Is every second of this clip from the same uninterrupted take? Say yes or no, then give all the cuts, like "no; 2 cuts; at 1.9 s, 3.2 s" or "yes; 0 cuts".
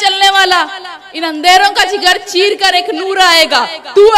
yes; 0 cuts